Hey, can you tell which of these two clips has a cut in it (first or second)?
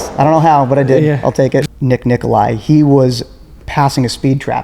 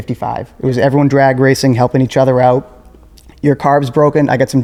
first